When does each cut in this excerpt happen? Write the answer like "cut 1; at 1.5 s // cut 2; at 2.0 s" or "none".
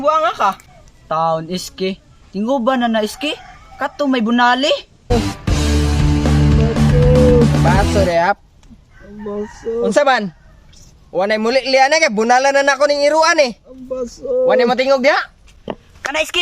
cut 1; at 5.1 s